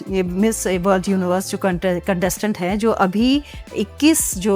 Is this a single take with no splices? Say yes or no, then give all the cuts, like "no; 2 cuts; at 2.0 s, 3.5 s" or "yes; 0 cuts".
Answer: yes; 0 cuts